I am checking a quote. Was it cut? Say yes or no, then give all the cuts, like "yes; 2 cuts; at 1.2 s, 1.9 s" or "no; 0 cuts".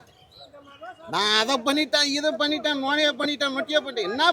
no; 0 cuts